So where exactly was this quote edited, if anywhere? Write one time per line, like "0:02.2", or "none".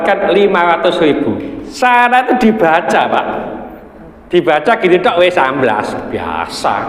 0:01.6